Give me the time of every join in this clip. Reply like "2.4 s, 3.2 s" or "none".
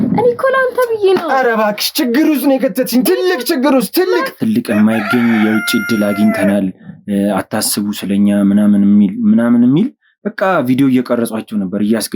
4.3 s